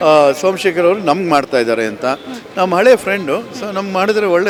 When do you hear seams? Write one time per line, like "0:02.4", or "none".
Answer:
none